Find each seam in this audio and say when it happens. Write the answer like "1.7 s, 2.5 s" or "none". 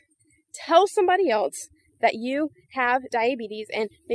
none